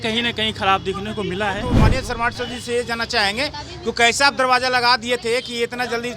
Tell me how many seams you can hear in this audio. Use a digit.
1